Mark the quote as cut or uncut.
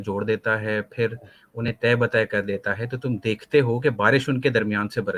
uncut